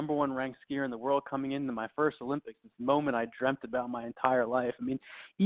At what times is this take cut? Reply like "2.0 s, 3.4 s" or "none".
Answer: none

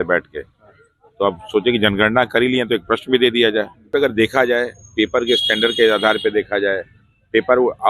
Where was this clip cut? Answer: 3.9 s

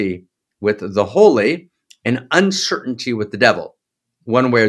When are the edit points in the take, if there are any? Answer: none

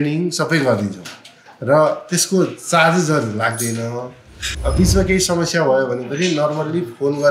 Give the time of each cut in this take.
4.5 s

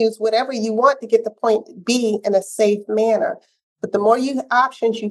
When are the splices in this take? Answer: none

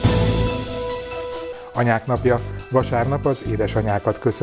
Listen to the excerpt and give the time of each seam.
1.2 s

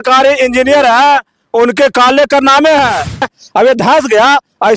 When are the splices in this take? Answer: 3.3 s

